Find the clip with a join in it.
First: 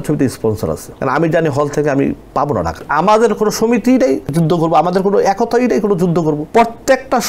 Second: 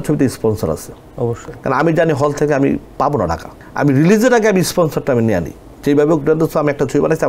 first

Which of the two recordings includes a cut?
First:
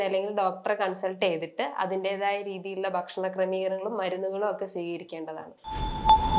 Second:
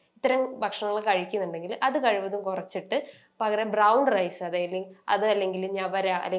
first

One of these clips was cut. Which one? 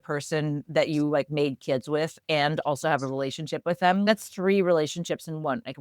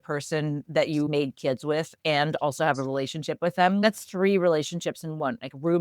second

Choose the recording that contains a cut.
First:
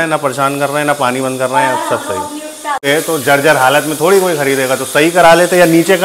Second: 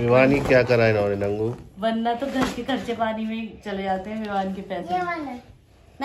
first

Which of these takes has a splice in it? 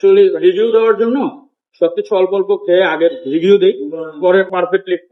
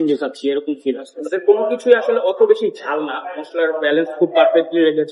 second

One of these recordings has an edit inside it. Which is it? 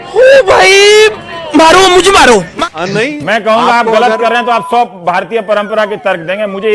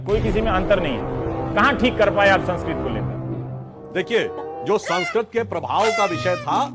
first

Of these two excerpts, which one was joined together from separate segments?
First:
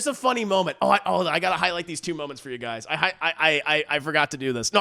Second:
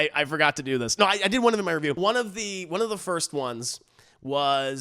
second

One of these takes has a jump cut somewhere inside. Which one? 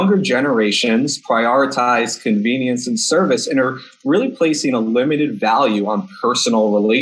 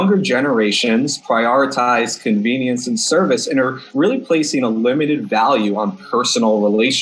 second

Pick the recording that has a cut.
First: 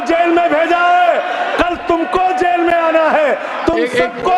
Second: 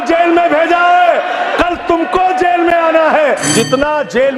second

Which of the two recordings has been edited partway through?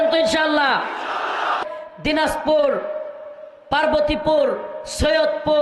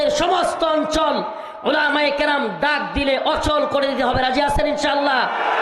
first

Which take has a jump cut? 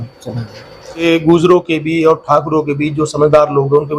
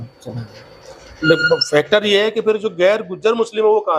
first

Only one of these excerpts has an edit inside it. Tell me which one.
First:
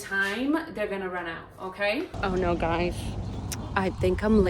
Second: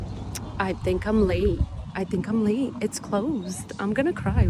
first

